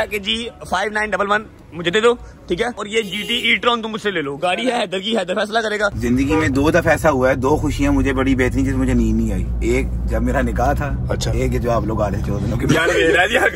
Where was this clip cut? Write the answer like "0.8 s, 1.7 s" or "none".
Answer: 2.8 s, 6.0 s